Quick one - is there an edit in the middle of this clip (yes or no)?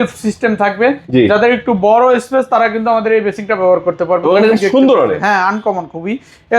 no